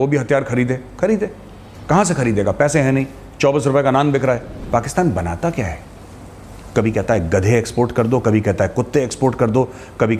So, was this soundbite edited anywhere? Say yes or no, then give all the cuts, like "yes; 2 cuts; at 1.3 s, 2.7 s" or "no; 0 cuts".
yes; 1 cut; at 4.5 s